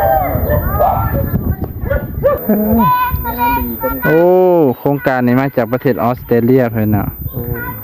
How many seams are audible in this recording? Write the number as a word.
one